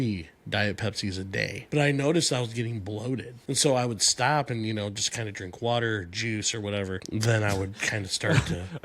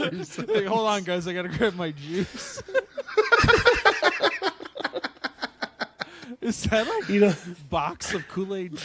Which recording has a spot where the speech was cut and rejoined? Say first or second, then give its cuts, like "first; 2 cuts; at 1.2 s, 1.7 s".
first; 3 cuts; at 1.6 s, 3.3 s, 7.0 s